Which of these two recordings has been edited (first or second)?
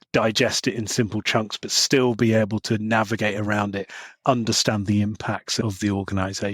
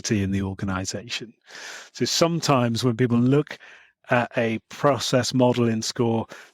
first